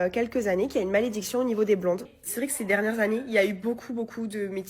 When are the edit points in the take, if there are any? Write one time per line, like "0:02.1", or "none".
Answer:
0:02.1